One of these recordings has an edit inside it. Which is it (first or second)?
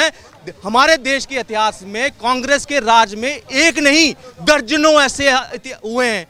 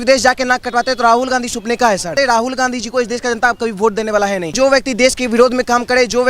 second